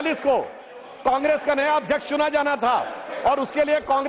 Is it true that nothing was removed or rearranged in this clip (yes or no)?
yes